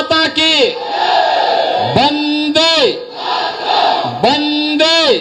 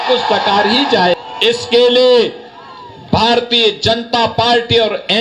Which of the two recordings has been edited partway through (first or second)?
second